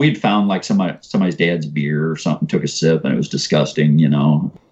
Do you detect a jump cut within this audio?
no; 0 cuts

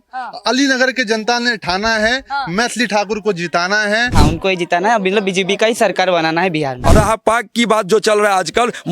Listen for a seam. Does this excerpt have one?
yes; 2 cuts; at 4.1 s, 6.8 s

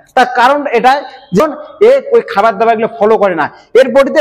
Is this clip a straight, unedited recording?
no; 1 cut; at 1.4 s

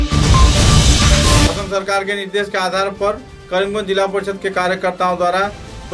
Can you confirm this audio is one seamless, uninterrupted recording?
yes; 0 cuts

